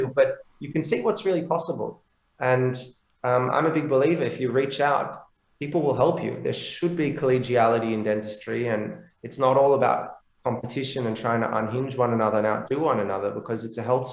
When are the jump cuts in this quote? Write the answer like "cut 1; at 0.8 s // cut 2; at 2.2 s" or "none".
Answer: none